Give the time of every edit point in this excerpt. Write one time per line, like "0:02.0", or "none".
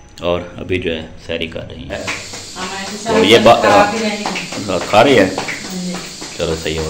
0:02.0